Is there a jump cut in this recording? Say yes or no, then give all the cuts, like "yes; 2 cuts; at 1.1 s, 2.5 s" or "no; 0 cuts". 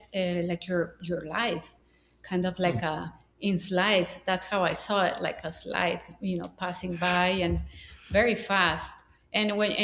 no; 0 cuts